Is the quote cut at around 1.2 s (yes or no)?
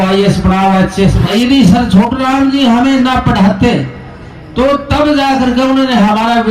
yes